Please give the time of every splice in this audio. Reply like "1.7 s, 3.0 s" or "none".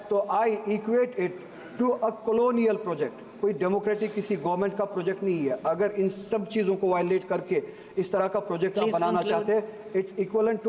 none